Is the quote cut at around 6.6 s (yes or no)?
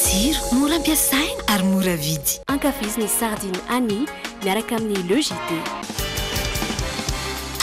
no